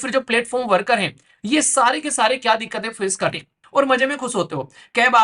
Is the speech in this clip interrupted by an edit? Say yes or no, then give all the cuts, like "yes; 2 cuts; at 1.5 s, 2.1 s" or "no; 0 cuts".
yes; 1 cut; at 3.6 s